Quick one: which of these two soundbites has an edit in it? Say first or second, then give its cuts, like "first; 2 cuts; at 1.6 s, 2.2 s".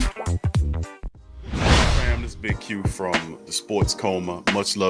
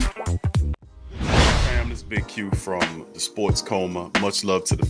first; 2 cuts; at 1.1 s, 2.1 s